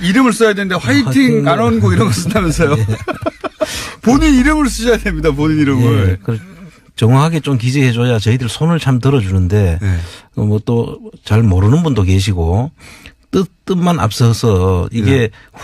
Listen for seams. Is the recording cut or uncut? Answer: uncut